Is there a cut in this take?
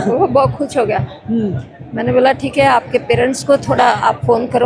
no; 0 cuts

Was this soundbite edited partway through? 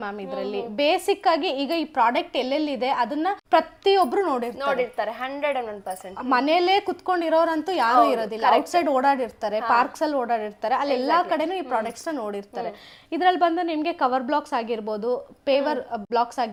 no; 0 cuts

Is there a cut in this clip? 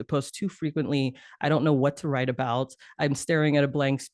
no; 0 cuts

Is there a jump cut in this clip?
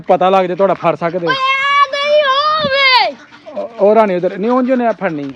no; 0 cuts

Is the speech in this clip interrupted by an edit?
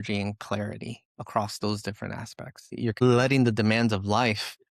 yes; 1 cut; at 2.8 s

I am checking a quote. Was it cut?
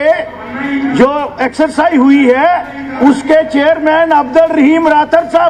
no; 0 cuts

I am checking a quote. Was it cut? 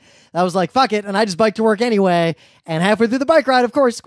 no; 0 cuts

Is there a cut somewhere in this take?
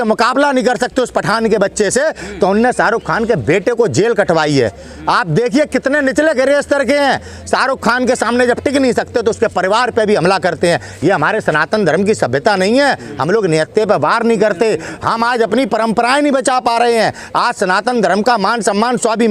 no; 0 cuts

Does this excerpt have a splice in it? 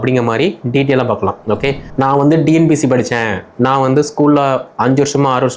yes; 1 cut; at 1.9 s

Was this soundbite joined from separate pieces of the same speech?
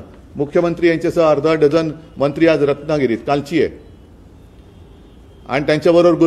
no; 0 cuts

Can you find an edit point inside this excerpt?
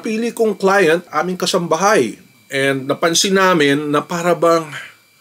no; 0 cuts

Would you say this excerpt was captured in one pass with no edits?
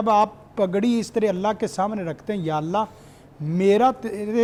yes; 0 cuts

